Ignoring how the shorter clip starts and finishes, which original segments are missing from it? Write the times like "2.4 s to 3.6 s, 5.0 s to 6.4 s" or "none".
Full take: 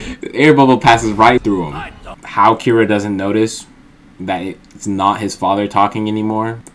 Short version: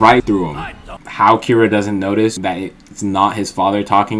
3.5 s to 4.2 s